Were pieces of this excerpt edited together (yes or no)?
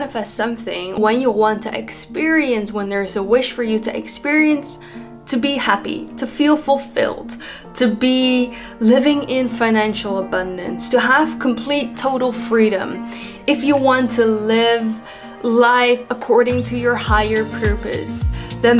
yes